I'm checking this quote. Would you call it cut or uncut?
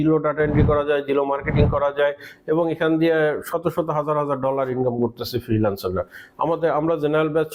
uncut